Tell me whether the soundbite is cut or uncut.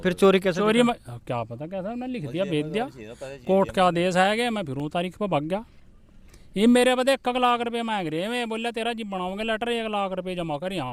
uncut